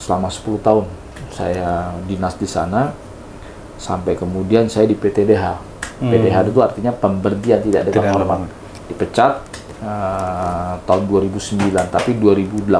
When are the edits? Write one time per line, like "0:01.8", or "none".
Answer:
none